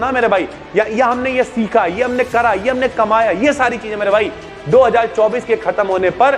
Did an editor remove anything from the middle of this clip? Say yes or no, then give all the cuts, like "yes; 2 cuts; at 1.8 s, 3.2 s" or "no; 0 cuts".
no; 0 cuts